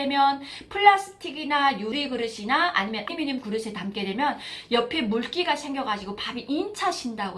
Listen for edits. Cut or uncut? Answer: cut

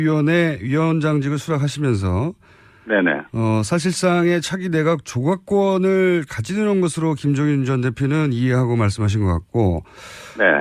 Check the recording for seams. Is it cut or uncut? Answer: cut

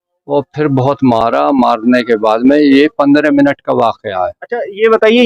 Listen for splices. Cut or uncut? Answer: uncut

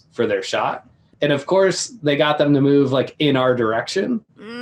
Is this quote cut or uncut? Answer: cut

